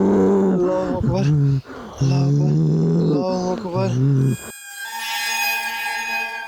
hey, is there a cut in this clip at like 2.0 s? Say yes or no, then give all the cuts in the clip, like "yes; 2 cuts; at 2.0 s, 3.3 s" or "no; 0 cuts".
no; 1 cut; at 5.1 s